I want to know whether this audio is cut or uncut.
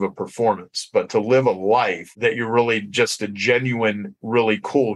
cut